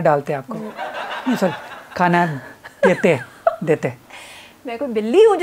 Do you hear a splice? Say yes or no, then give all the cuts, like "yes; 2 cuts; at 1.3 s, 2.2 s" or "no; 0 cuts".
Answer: no; 0 cuts